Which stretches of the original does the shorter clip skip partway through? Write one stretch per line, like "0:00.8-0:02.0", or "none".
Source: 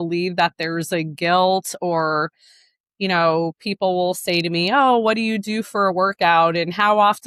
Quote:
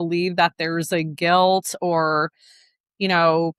none